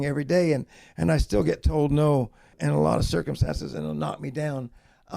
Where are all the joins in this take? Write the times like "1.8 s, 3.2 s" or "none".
2.6 s